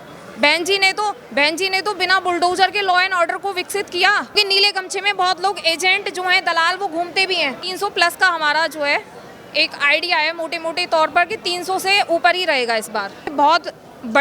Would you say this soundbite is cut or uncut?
cut